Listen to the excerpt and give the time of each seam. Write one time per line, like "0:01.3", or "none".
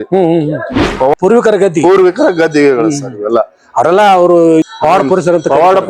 0:01.1
0:04.6